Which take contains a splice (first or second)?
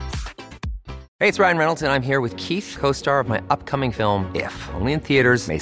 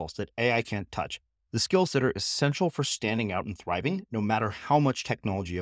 first